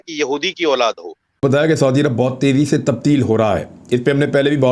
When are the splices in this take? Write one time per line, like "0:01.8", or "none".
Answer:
0:01.4